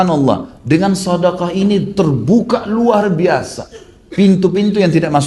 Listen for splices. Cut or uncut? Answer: uncut